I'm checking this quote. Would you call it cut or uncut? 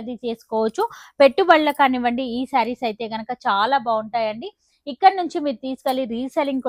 uncut